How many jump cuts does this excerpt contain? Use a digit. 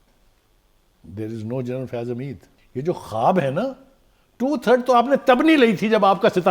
1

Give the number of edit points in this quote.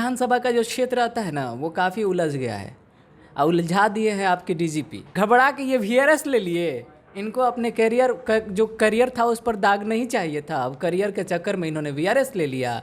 1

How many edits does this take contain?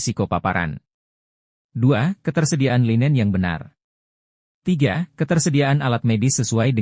0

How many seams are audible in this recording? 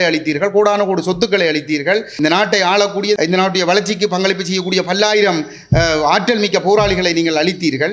2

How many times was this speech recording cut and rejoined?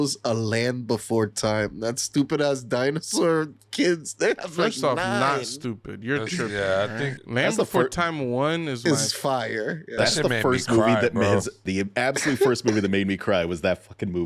3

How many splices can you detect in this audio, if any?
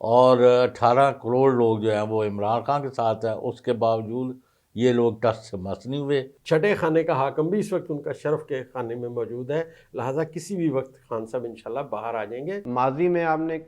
2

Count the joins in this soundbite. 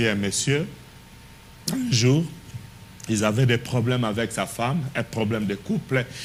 0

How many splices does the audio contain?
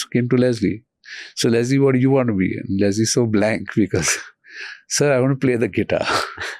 0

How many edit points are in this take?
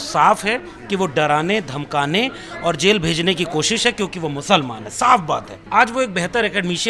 1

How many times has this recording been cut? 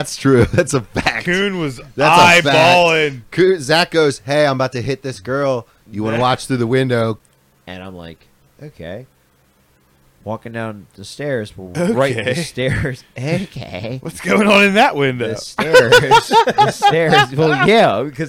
1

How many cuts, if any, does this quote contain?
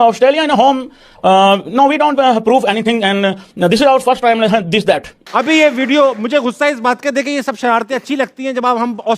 1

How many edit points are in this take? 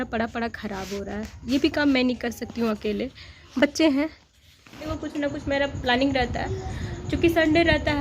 1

